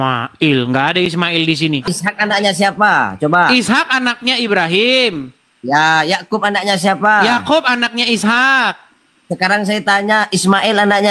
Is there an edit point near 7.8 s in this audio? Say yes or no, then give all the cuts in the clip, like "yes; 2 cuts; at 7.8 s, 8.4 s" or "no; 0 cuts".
no; 1 cut; at 1.8 s